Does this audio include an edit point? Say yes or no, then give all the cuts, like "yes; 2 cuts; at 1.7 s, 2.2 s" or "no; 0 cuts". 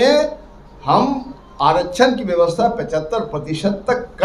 no; 0 cuts